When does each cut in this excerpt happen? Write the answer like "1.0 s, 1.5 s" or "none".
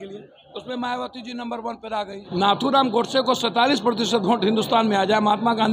2.2 s

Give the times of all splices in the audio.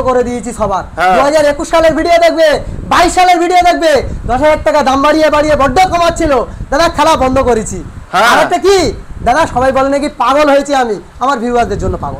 none

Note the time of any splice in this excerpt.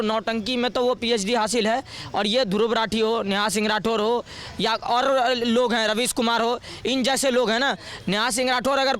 none

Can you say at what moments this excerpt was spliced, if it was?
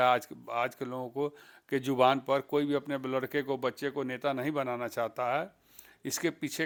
none

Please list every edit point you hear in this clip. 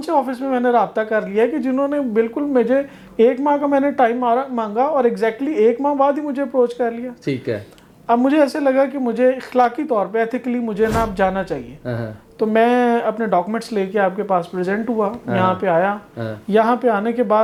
none

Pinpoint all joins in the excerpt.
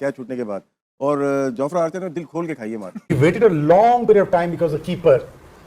3.1 s

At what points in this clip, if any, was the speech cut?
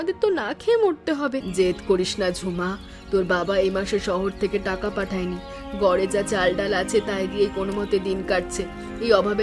1.5 s

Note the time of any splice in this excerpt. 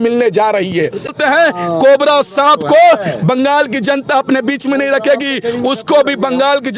1.2 s

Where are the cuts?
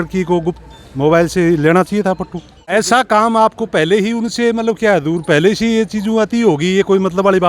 2.7 s

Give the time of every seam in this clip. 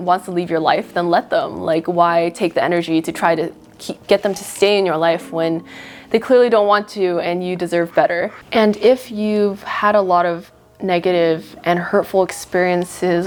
none

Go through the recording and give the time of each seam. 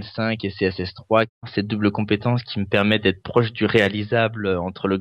1.5 s

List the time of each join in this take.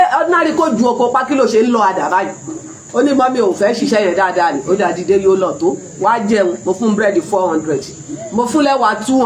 none

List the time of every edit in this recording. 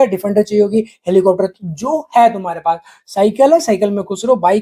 none

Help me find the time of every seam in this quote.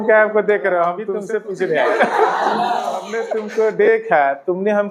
1.1 s, 3.2 s

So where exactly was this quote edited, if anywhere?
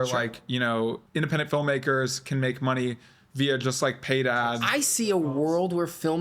1.0 s, 4.6 s

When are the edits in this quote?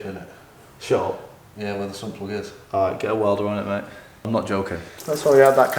4.1 s, 4.9 s

